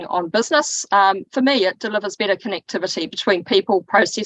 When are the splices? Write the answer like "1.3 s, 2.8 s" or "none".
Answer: none